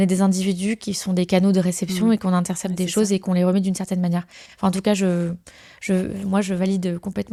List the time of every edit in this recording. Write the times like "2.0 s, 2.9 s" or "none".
none